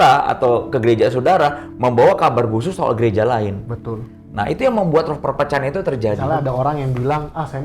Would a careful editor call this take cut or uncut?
cut